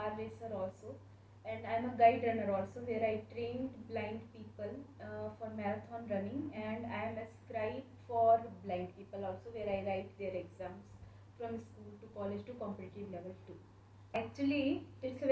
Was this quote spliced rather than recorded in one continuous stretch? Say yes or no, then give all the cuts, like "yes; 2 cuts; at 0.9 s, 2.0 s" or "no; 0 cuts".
no; 0 cuts